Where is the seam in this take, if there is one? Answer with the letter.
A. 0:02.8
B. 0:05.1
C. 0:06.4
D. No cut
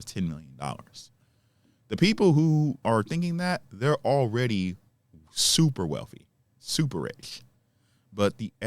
A